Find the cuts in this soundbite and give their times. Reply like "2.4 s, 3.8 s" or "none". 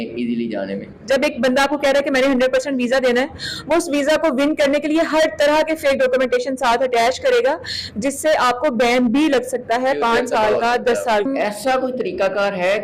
0.9 s, 11.3 s